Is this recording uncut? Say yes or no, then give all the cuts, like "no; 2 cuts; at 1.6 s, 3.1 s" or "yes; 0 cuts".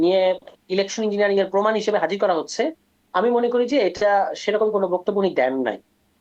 yes; 0 cuts